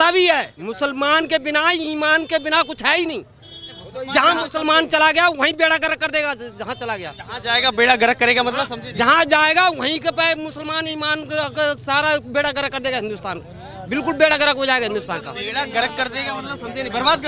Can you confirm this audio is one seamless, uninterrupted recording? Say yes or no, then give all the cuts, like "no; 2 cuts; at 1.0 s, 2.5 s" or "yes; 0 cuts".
yes; 0 cuts